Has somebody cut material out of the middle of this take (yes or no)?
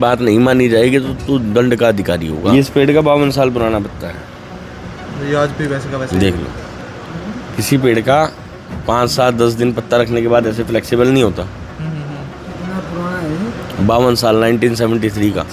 yes